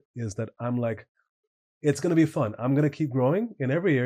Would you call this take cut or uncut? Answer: uncut